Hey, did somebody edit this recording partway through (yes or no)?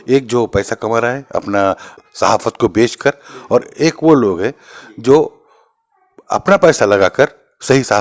yes